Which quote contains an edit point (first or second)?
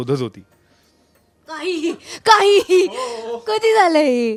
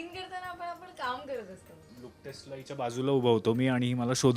second